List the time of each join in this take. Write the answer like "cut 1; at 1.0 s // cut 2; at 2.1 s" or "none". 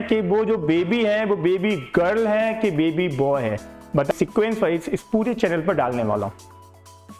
cut 1; at 4.1 s